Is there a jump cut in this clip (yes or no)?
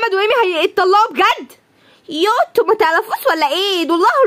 no